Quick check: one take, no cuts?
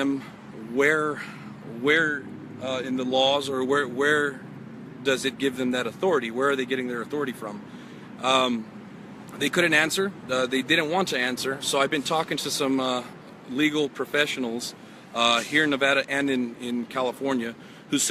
no; 1 cut; at 11.2 s

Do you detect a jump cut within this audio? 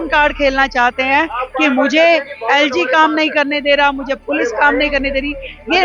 no; 0 cuts

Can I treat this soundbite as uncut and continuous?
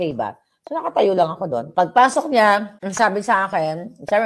no; 2 cuts; at 1.7 s, 2.8 s

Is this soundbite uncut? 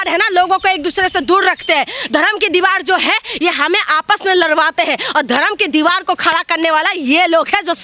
yes; 0 cuts

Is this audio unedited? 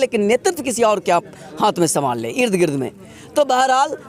yes; 0 cuts

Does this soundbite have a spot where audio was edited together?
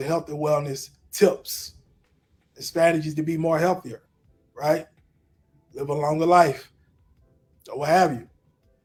no; 0 cuts

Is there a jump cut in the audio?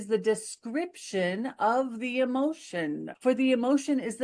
yes; 1 cut; at 3.1 s

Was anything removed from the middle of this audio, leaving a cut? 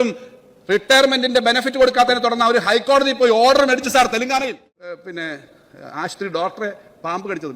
yes; 1 cut; at 4.5 s

